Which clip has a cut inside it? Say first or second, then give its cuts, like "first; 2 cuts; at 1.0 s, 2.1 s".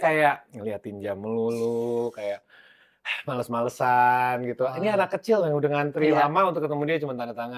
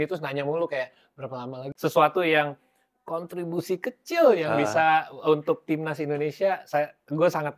second; 1 cut; at 1.6 s